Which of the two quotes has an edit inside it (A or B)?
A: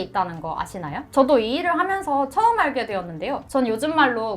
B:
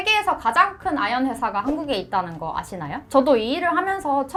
A